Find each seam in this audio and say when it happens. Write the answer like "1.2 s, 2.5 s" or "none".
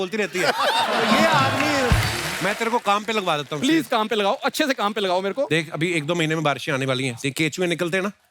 2.2 s